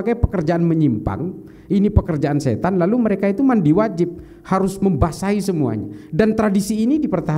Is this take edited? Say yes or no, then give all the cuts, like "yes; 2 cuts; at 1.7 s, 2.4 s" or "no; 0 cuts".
no; 0 cuts